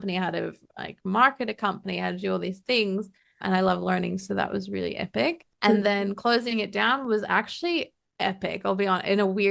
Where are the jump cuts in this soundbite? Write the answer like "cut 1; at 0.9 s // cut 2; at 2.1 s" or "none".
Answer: cut 1; at 5.5 s // cut 2; at 8.0 s